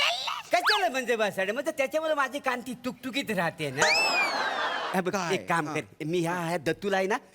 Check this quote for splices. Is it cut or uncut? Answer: cut